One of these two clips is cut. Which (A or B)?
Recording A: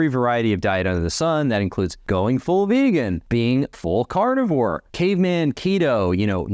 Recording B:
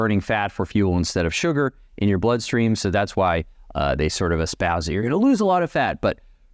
A